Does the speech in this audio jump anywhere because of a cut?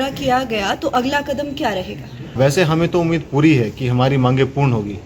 yes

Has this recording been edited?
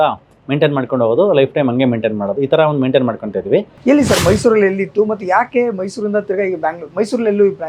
yes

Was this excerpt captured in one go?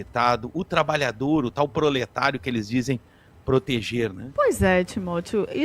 no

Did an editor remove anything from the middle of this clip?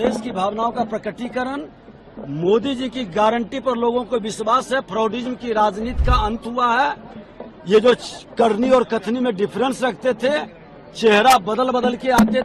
no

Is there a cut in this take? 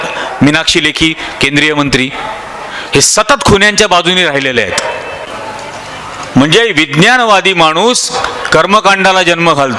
yes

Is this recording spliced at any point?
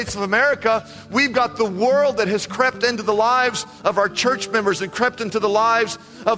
no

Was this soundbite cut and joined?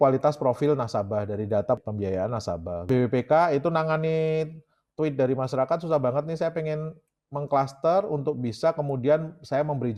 no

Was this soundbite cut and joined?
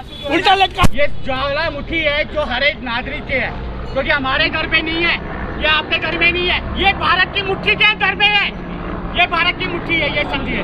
yes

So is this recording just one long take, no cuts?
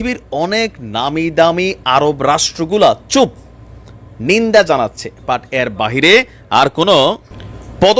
yes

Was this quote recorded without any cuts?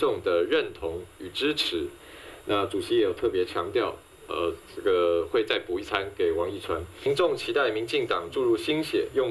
no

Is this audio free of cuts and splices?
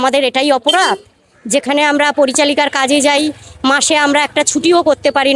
yes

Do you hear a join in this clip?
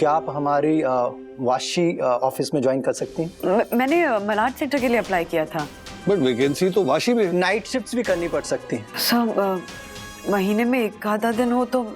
yes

